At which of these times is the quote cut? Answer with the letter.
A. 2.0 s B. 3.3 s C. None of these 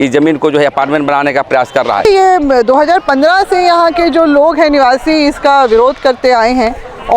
A